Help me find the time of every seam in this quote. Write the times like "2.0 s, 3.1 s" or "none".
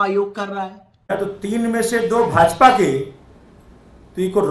1.0 s

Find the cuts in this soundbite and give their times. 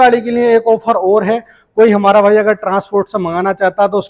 none

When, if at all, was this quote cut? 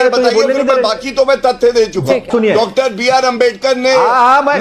2.3 s

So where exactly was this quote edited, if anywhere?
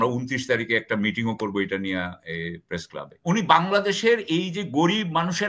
3.1 s

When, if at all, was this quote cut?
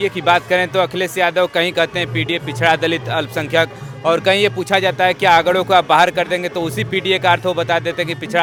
none

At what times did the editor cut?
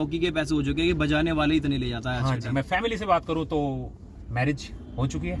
2.5 s

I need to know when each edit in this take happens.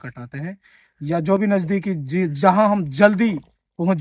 none

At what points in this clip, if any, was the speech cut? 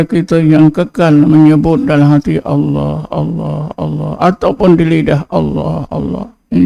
none

